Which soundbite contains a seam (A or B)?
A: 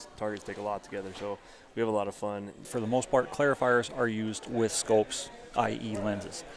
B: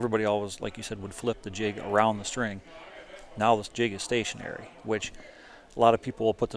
A